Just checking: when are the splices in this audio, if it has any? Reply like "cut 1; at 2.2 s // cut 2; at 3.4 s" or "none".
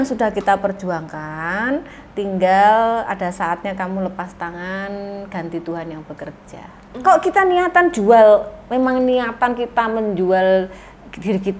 cut 1; at 6.8 s